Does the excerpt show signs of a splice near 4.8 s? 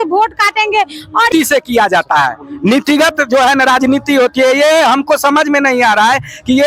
no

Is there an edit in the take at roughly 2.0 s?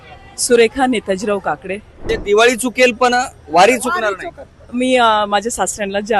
yes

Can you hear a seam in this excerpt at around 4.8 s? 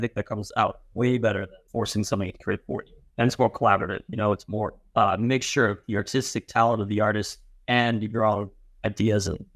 yes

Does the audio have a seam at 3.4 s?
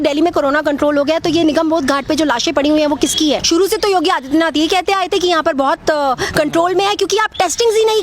yes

